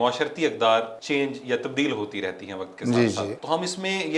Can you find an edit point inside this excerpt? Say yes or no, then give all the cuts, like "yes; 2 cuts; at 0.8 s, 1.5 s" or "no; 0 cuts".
yes; 2 cuts; at 1.0 s, 3.4 s